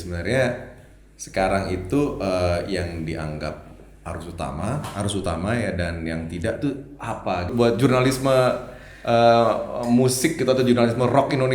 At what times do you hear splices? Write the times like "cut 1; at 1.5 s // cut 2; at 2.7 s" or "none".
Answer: cut 1; at 7.5 s